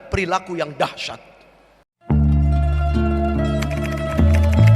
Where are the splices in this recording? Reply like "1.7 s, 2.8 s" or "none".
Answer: 1.9 s